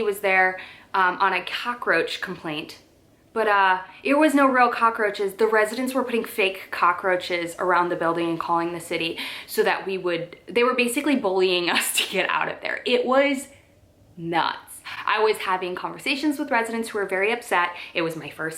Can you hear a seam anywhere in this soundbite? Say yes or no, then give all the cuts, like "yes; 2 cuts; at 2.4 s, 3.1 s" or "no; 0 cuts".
no; 0 cuts